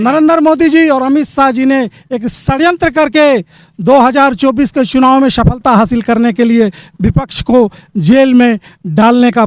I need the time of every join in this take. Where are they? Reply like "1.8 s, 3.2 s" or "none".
none